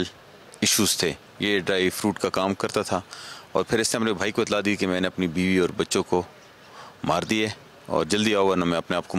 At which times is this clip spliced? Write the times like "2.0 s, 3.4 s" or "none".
none